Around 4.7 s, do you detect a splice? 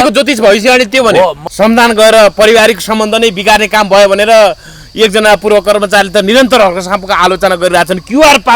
no; 1 cut; at 1.4 s

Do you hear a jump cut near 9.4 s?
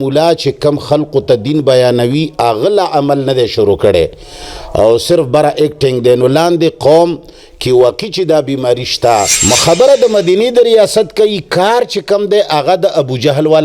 yes; 1 cut; at 9.4 s

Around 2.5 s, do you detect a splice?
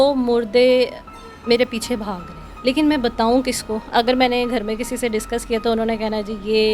yes; 1 cut; at 2.5 s

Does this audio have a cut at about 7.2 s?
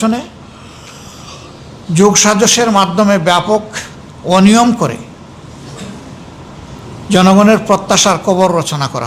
no; 0 cuts

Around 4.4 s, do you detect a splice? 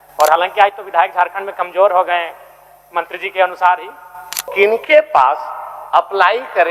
yes; 1 cut; at 4.4 s

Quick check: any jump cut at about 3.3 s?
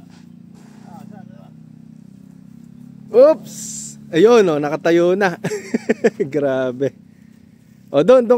no; 0 cuts

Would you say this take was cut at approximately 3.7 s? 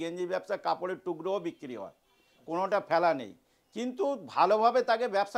no; 0 cuts

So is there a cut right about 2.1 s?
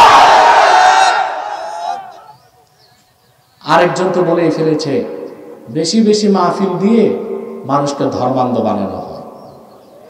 yes; 1 cut; at 2.1 s

